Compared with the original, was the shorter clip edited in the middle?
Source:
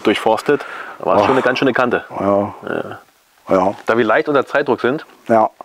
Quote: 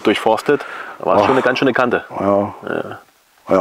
no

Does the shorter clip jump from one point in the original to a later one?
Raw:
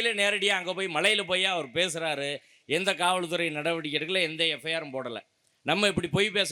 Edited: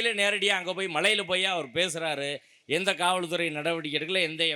no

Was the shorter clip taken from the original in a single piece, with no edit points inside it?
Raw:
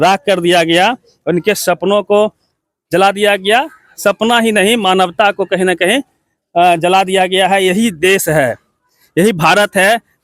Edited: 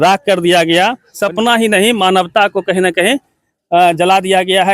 no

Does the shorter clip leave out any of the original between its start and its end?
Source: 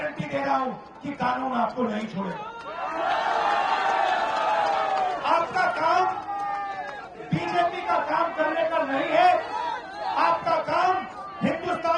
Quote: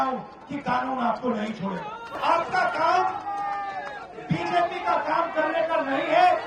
yes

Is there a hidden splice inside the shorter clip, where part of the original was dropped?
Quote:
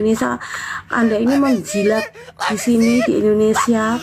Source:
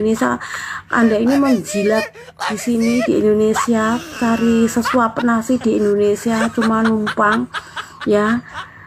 no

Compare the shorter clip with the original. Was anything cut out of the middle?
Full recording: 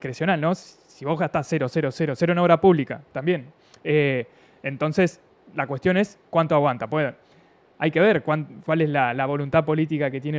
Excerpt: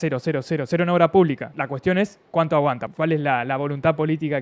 yes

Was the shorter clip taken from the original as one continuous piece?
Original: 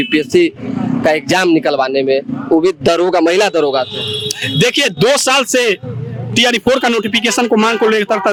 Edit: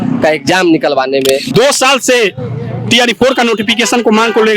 no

